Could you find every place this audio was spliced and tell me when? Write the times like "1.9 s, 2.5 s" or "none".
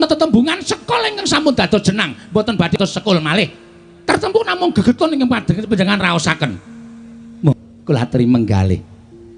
2.8 s, 7.5 s